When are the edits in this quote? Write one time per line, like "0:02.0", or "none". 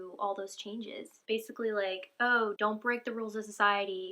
0:01.1
0:02.6